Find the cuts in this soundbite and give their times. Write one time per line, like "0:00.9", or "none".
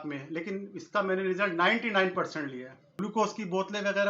0:02.9